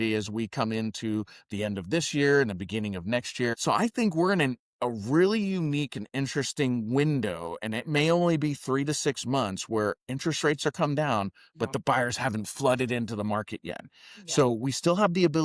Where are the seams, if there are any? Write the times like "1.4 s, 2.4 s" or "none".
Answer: 3.6 s

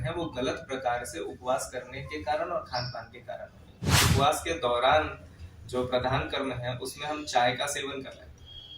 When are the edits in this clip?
4.0 s

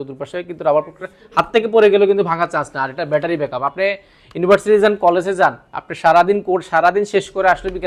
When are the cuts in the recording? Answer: none

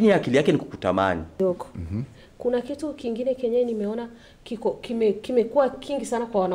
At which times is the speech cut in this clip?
1.3 s

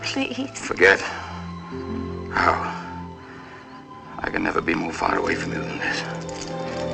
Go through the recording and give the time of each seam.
none

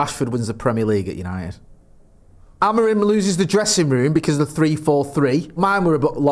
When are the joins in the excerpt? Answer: 2.5 s, 5.6 s

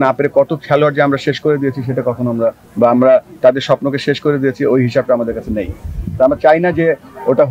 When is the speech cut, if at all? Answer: none

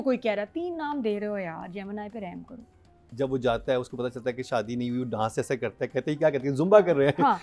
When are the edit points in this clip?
3.0 s

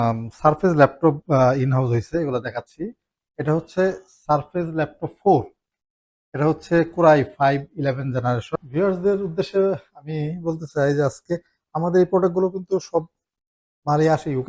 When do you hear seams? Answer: 8.5 s

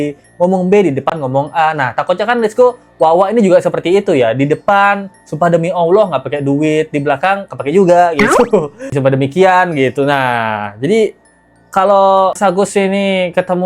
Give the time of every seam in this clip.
none

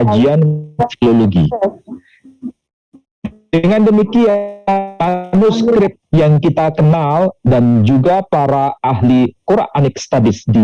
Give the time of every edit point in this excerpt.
none

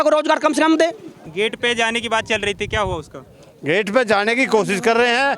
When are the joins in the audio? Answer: 1.3 s

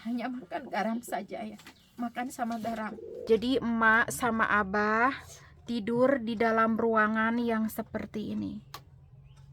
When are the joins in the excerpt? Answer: 3.1 s

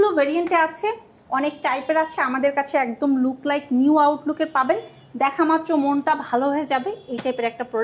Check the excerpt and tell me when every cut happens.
none

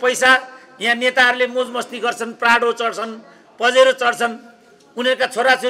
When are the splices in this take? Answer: none

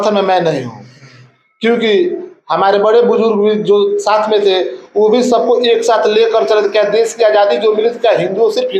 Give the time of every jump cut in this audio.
none

